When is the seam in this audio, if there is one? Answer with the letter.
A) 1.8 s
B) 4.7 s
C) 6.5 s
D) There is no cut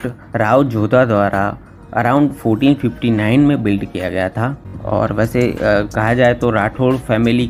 B